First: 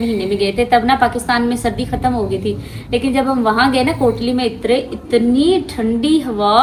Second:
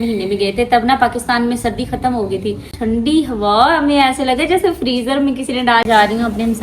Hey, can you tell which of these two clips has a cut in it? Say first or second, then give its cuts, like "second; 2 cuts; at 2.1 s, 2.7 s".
second; 2 cuts; at 2.7 s, 5.9 s